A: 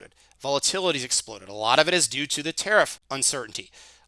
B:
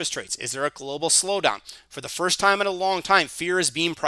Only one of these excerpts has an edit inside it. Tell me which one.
A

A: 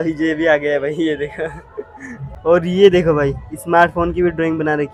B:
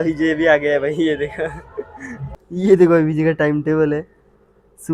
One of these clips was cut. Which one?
B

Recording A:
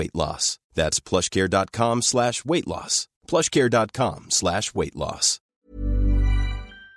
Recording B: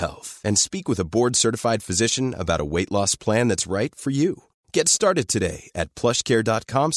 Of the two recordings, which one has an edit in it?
A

